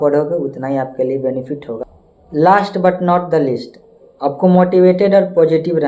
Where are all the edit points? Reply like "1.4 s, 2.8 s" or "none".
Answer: 1.9 s